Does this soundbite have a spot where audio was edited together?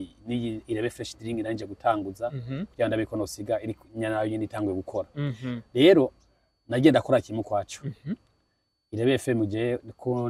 no; 0 cuts

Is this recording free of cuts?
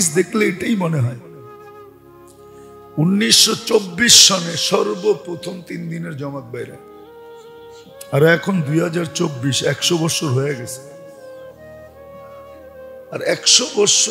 no; 6 cuts; at 1.2 s, 2.9 s, 6.7 s, 8.1 s, 10.9 s, 13.0 s

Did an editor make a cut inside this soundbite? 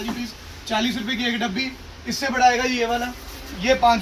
no; 0 cuts

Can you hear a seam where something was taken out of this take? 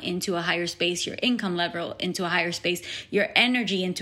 no; 0 cuts

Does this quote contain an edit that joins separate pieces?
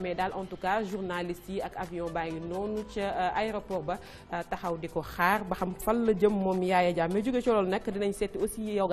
no; 0 cuts

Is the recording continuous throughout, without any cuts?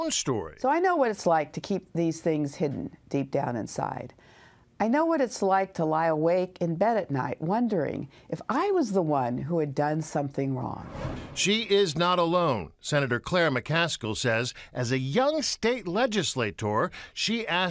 yes; 0 cuts

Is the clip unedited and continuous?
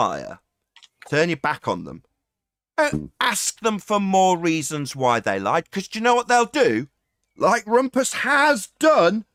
yes; 0 cuts

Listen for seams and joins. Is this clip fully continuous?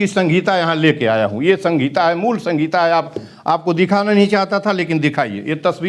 yes; 0 cuts

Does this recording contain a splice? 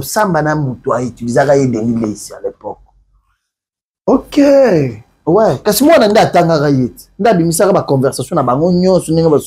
no; 0 cuts

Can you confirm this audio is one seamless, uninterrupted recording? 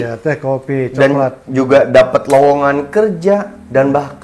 yes; 0 cuts

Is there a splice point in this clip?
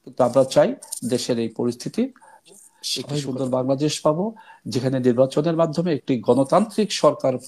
yes; 1 cut; at 3.1 s

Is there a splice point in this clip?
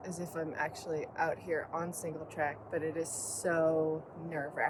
no; 0 cuts

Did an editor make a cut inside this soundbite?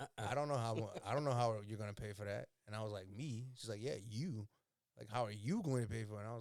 no; 0 cuts

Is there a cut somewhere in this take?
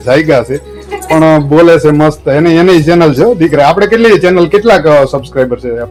no; 0 cuts

